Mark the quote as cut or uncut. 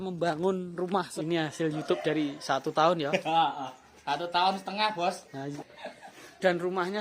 cut